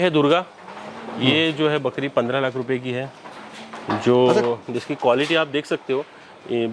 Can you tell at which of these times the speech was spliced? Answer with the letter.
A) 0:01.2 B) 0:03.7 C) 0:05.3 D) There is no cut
D